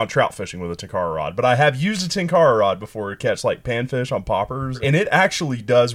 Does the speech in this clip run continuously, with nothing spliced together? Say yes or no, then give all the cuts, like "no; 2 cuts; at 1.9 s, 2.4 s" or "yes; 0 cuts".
no; 1 cut; at 4.8 s